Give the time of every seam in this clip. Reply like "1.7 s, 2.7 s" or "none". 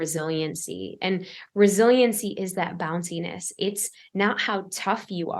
none